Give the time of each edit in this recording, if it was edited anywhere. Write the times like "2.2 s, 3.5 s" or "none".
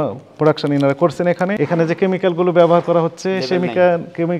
1.5 s